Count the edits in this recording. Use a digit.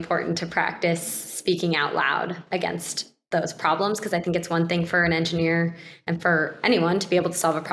0